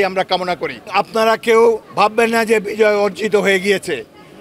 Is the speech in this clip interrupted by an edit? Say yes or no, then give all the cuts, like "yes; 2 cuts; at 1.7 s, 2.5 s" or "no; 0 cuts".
yes; 2 cuts; at 0.9 s, 1.9 s